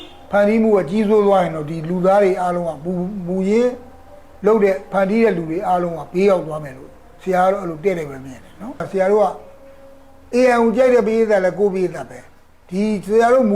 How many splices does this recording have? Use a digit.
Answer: 1